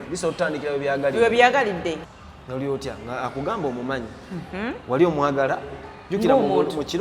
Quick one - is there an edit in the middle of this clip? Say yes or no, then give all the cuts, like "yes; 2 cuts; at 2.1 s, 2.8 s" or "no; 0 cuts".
yes; 1 cut; at 2.0 s